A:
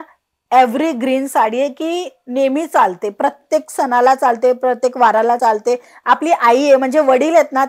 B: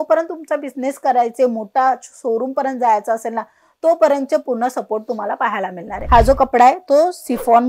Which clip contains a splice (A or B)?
B